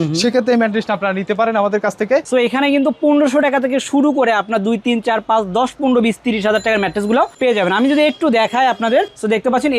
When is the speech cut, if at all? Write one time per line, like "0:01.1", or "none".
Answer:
0:02.3